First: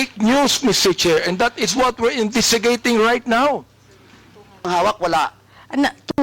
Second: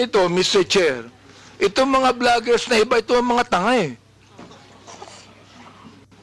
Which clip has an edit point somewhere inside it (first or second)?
first